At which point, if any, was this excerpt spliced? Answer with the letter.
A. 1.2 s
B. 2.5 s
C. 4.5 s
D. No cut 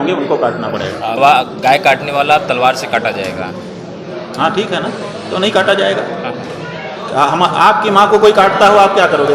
A